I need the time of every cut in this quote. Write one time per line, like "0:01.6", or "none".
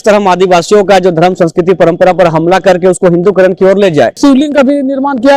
0:04.1